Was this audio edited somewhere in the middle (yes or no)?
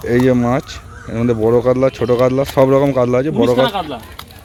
no